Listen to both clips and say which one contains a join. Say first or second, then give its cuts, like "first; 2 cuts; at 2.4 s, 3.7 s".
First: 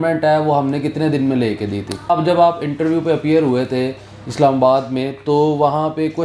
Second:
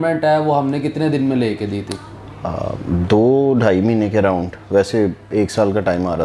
first; 1 cut; at 2.1 s